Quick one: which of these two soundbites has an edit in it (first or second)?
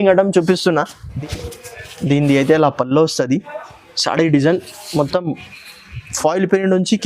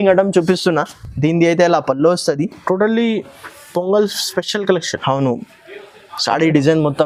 first